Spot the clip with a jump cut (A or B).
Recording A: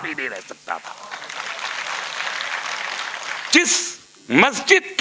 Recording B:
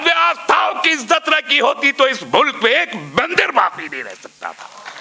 A